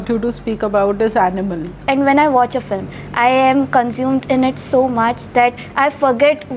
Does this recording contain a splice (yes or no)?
yes